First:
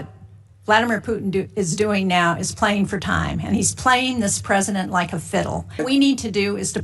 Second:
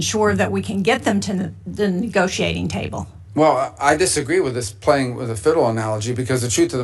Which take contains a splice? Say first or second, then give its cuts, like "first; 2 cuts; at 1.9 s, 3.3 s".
first; 1 cut; at 5.8 s